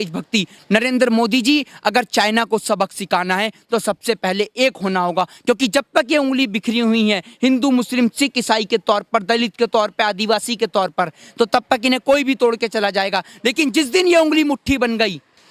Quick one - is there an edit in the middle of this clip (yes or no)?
no